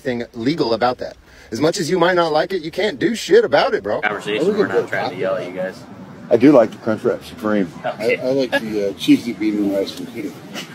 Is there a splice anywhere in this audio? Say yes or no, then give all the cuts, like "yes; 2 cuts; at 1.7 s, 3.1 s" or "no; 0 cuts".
yes; 1 cut; at 4.1 s